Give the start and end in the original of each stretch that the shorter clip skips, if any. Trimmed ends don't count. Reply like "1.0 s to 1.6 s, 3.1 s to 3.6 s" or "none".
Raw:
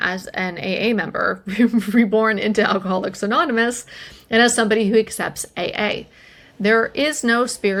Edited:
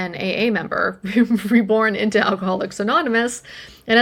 none